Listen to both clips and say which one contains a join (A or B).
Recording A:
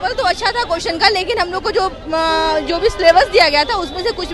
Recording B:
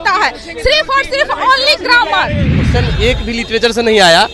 B